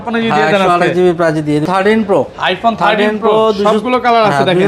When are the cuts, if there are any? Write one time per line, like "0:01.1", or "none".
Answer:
0:01.6